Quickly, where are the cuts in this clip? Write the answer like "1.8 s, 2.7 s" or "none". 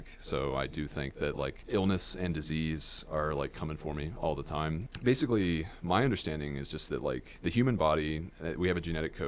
1.6 s, 4.8 s